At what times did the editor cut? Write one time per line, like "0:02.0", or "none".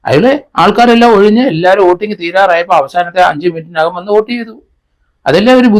none

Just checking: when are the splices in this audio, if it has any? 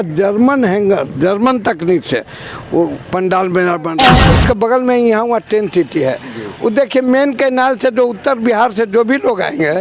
0:04.1

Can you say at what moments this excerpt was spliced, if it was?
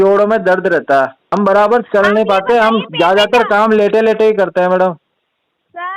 0:01.2

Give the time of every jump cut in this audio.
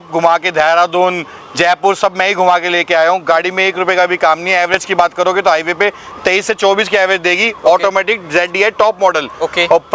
none

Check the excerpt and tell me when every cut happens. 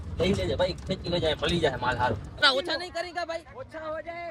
0:02.5

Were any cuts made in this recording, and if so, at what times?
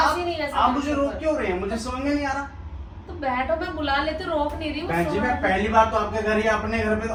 none

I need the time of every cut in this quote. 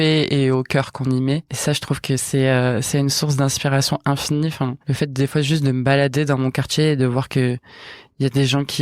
0:04.8

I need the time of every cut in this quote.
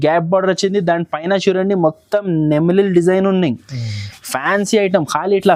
none

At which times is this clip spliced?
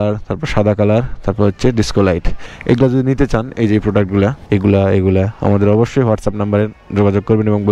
none

